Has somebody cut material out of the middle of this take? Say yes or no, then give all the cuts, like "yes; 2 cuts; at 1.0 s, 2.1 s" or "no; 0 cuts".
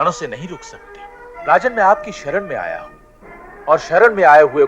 yes; 1 cut; at 1.3 s